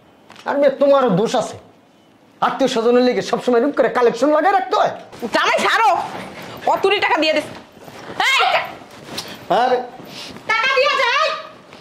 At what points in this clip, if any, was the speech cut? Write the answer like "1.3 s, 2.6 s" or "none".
5.1 s